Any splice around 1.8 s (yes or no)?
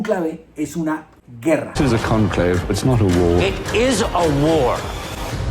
yes